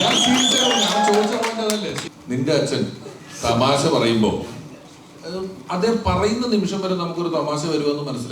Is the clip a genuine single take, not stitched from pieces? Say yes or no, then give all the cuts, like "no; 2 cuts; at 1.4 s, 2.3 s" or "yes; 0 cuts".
no; 1 cut; at 2.1 s